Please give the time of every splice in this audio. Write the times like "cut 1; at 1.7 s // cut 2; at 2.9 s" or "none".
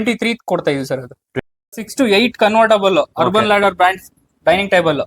cut 1; at 1.3 s